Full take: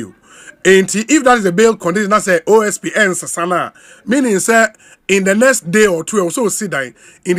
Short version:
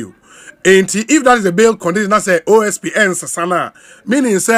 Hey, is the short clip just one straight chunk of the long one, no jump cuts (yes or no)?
yes